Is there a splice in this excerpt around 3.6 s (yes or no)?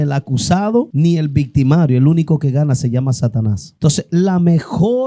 yes